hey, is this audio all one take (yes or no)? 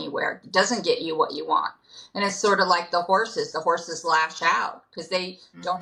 yes